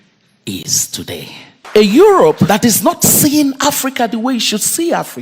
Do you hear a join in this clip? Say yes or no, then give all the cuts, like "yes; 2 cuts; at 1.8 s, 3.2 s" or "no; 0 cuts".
yes; 2 cuts; at 1.7 s, 2.5 s